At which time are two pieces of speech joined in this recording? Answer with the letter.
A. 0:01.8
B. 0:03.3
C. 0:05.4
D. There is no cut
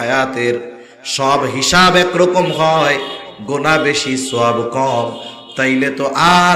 D